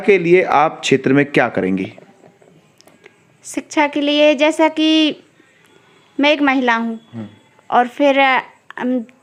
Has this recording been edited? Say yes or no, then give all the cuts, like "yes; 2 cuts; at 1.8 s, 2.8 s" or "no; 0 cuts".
no; 0 cuts